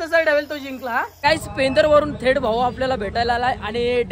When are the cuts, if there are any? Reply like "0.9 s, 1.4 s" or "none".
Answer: 1.1 s